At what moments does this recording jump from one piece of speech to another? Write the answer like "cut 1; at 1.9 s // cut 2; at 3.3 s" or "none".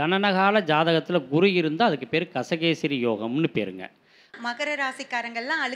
cut 1; at 4.4 s